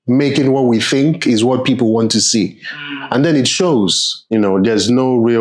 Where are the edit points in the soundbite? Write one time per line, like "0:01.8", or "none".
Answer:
0:04.1